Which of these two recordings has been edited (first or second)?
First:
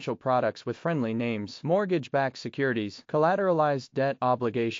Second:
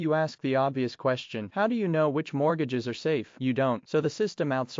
second